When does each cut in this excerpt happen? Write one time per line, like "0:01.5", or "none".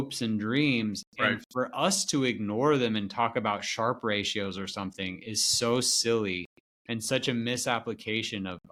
none